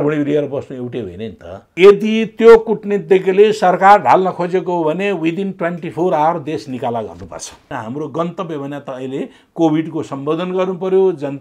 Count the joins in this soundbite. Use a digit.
2